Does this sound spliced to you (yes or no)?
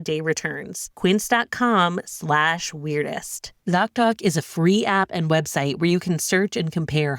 yes